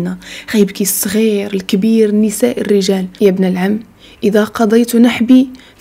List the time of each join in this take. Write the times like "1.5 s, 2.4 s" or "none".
3.1 s